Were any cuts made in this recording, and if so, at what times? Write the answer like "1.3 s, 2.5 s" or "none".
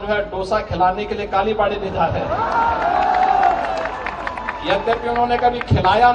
none